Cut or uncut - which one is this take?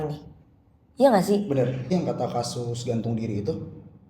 cut